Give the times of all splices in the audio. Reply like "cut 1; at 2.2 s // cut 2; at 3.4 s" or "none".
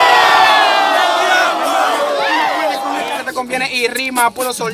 cut 1; at 3.2 s